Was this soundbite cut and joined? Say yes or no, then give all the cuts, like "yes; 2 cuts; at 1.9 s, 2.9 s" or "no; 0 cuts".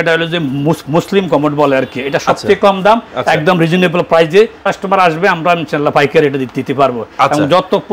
yes; 1 cut; at 4.6 s